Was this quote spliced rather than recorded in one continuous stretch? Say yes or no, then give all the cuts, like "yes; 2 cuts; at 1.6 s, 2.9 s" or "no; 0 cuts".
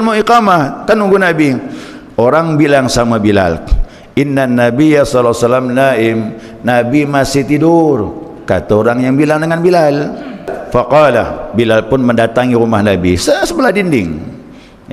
yes; 1 cut; at 10.5 s